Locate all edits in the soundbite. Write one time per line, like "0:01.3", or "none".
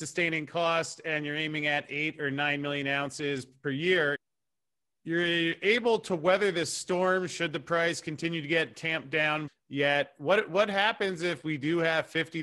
0:03.5
0:04.2
0:09.4